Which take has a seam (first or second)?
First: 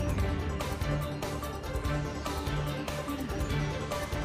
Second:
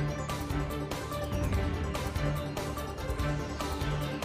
first